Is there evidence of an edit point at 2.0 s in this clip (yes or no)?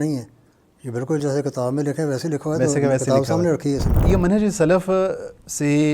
no